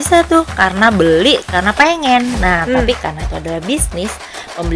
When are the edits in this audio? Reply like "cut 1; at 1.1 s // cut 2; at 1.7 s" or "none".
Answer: none